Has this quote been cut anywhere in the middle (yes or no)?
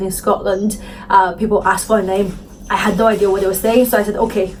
no